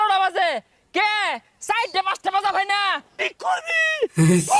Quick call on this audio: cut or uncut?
cut